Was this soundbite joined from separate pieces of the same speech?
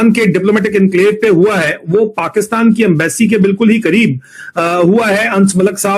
no; 0 cuts

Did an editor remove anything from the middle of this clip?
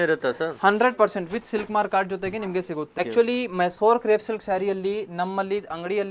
yes; 1 cut; at 3.0 s

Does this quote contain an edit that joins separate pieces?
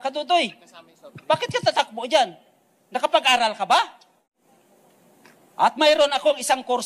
yes; 1 cut; at 4.2 s

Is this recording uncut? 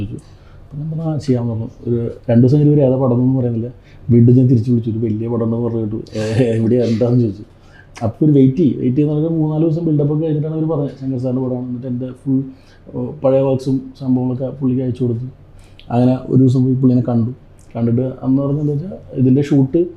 yes; 0 cuts

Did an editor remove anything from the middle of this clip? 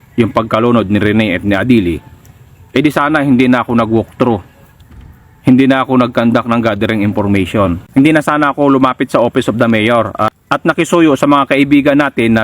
no; 0 cuts

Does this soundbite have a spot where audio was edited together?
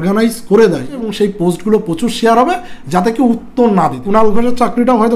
yes; 2 cuts; at 1.0 s, 4.0 s

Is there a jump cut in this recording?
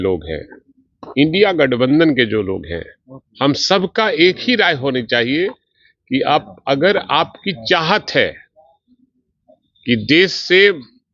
no; 0 cuts

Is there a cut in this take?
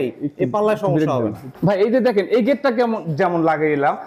no; 0 cuts

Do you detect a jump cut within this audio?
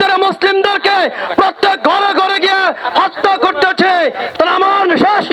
yes; 1 cut; at 4.2 s

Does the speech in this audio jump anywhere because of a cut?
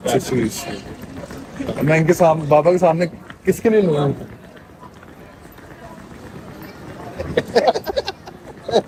no; 0 cuts

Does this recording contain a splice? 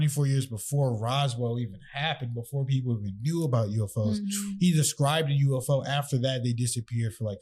no; 0 cuts

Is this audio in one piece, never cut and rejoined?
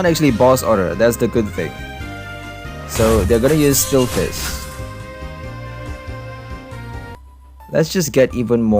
no; 1 cut; at 7.1 s

